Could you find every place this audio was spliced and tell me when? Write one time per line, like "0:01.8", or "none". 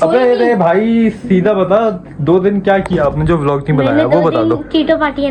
none